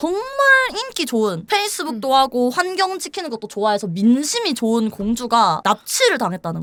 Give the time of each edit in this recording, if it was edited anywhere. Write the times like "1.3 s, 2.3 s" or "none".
none